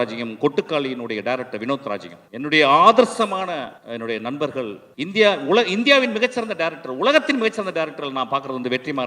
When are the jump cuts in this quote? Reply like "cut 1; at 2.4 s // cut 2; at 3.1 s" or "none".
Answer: cut 1; at 2.2 s // cut 2; at 3.8 s // cut 3; at 4.8 s